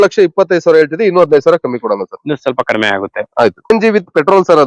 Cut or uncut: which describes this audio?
cut